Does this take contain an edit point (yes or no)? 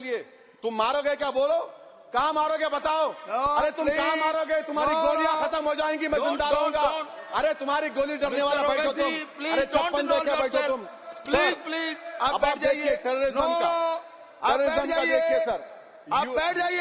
no